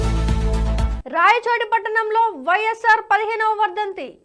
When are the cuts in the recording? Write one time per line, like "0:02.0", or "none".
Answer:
none